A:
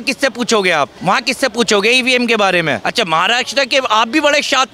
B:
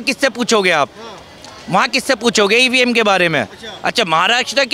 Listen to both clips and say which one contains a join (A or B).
A